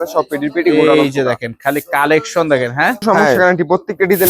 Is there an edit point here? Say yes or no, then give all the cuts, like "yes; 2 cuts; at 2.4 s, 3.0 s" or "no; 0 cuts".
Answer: yes; 1 cut; at 3.2 s